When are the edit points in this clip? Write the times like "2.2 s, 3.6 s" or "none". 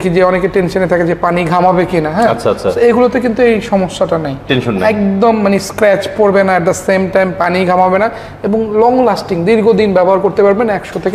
none